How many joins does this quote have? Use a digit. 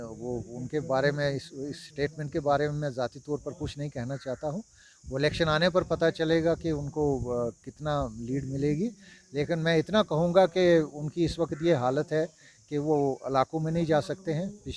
0